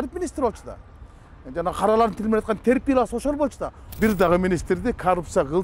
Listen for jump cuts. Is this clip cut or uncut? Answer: cut